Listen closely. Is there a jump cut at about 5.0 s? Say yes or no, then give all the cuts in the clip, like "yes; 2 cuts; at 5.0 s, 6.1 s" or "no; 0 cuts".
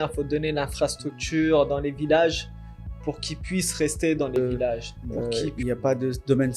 yes; 1 cut; at 5.0 s